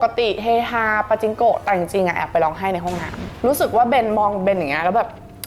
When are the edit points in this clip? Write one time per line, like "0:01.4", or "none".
0:03.2